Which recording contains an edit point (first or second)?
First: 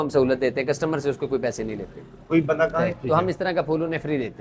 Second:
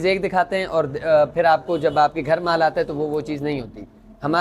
first